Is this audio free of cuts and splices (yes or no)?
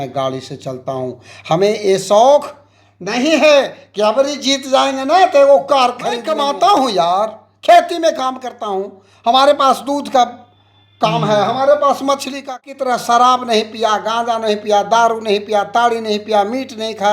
no